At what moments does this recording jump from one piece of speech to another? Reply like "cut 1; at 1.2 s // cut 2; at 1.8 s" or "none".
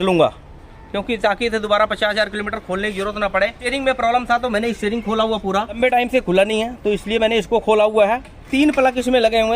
cut 1; at 3.6 s // cut 2; at 5.8 s // cut 3; at 8.3 s

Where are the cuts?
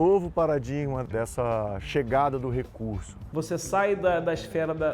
cut 1; at 1.0 s // cut 2; at 3.2 s

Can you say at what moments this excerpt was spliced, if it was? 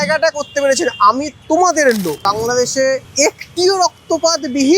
cut 1; at 1.3 s // cut 2; at 2.7 s

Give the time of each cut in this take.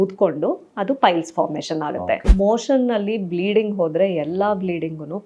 cut 1; at 2.2 s

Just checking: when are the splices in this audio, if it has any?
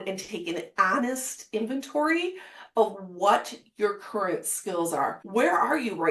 cut 1; at 5.2 s

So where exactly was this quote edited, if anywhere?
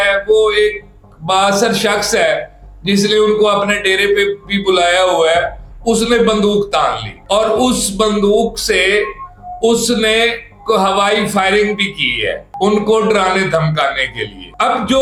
none

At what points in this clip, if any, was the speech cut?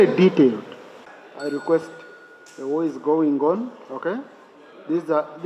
cut 1; at 1.1 s

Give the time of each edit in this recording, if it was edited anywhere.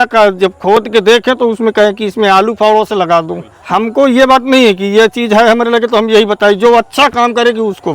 cut 1; at 3.5 s

